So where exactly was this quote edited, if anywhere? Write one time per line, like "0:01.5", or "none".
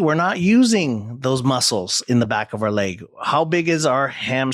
none